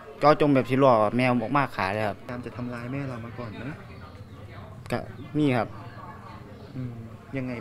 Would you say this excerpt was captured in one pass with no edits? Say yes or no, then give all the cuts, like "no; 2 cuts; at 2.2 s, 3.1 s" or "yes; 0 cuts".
yes; 0 cuts